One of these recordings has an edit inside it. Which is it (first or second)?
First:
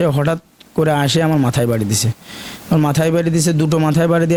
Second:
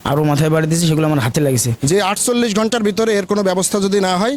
second